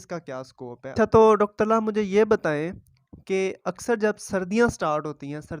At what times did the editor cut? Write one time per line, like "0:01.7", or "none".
0:00.9